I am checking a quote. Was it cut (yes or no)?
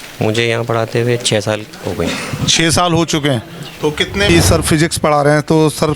yes